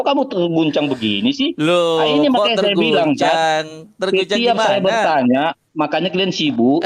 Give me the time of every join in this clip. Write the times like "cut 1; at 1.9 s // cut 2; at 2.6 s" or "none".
none